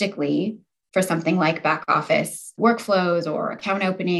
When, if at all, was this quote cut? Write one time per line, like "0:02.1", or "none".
0:02.5